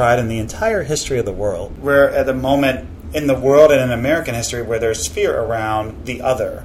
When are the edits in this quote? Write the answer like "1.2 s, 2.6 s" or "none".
1.8 s